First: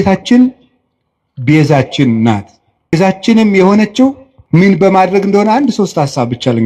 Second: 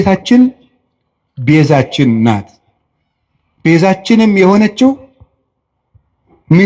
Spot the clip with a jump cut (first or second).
first